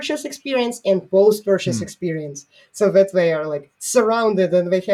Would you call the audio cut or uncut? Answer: uncut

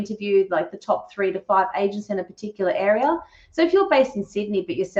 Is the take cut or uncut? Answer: uncut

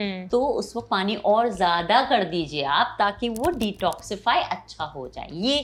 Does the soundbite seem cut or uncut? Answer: uncut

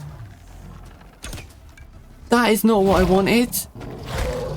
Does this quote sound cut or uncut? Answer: cut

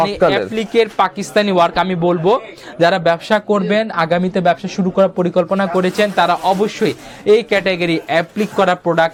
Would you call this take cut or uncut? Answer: uncut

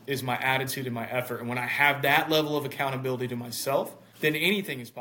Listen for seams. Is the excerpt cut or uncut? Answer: cut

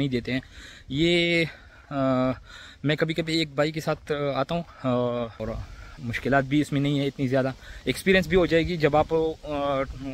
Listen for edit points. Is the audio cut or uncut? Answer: cut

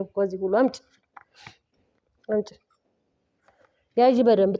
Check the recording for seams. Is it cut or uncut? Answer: uncut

